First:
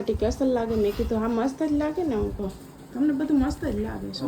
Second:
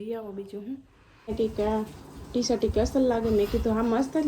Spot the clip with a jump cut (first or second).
second